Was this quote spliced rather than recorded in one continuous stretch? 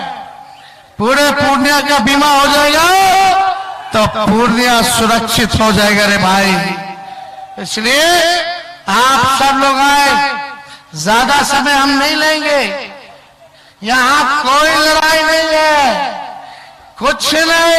no; 0 cuts

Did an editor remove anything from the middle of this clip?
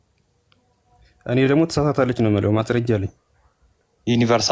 no; 0 cuts

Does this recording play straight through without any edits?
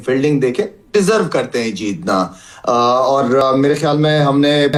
yes; 0 cuts

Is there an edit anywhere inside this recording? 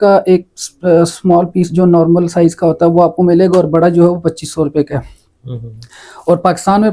no; 0 cuts

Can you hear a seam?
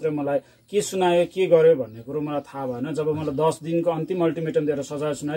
no; 0 cuts

